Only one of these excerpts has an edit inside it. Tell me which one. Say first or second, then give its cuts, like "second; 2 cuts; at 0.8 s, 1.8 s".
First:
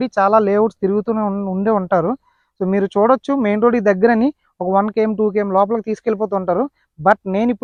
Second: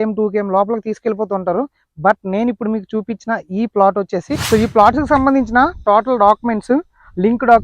second; 1 cut; at 4.3 s